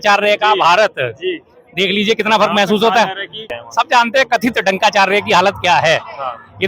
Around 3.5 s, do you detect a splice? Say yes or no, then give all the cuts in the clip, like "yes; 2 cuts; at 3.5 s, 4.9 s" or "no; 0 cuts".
yes; 1 cut; at 3.5 s